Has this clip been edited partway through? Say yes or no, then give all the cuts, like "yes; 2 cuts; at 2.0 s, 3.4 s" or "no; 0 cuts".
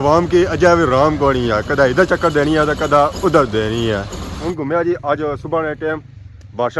yes; 1 cut; at 4.4 s